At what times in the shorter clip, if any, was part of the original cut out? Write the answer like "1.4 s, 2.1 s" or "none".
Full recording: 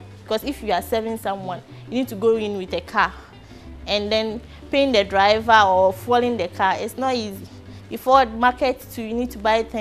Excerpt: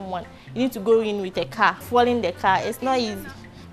1.8 s